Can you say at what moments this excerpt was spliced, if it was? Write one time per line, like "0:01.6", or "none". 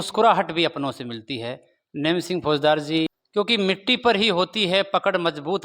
0:03.1